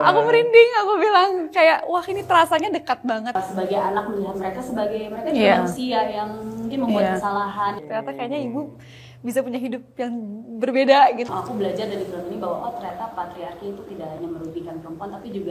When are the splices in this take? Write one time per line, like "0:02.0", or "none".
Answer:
0:03.3
0:07.8
0:11.3